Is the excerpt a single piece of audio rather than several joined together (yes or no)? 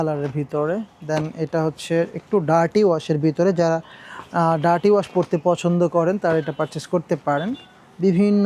yes